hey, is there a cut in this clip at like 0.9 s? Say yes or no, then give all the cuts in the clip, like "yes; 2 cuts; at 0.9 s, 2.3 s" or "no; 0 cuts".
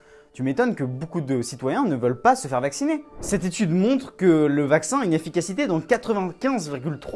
no; 1 cut; at 3.2 s